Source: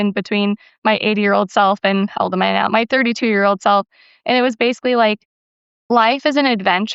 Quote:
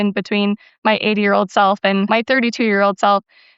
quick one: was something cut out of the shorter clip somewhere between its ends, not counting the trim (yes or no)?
yes